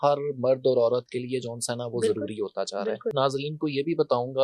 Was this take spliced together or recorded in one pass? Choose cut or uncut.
cut